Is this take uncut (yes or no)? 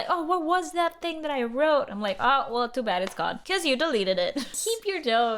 no